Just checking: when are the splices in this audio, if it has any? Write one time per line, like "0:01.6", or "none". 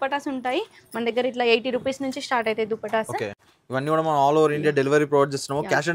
0:03.5